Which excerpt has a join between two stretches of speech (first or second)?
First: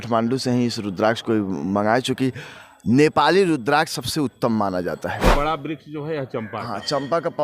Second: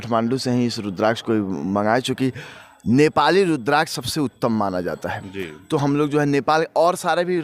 first